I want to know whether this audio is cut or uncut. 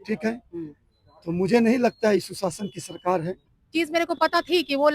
cut